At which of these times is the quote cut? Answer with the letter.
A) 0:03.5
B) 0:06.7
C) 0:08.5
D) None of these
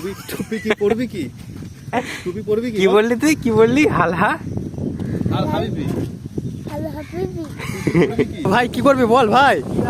C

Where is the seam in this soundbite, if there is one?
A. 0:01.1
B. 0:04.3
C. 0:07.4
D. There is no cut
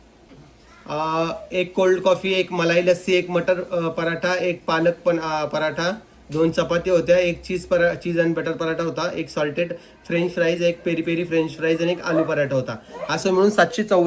D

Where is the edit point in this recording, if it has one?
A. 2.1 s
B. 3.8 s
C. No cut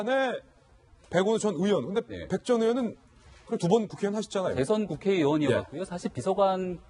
B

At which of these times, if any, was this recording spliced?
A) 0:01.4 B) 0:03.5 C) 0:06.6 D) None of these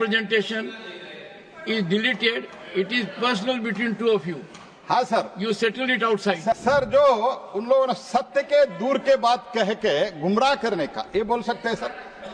C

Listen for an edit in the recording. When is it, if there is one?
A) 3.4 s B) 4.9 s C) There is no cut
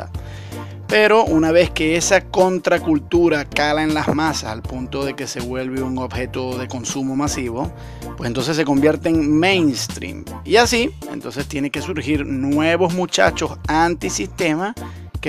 B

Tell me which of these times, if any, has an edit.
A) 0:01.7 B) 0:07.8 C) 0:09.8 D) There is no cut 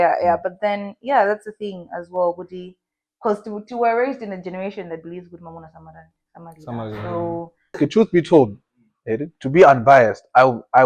B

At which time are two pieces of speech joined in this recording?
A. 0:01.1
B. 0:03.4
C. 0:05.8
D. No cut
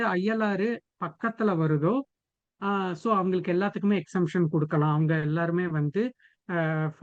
D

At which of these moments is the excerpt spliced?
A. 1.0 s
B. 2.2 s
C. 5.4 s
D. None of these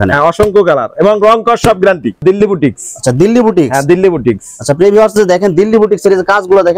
B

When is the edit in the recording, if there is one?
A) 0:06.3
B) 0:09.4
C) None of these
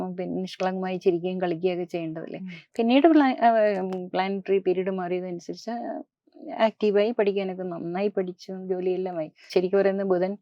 B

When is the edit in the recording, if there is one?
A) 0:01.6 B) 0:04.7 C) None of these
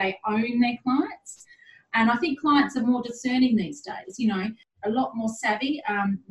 B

